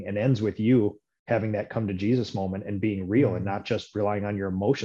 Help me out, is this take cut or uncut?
uncut